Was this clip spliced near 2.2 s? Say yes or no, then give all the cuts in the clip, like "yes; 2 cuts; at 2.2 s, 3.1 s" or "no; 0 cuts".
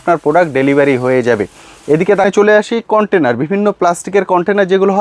yes; 1 cut; at 2.2 s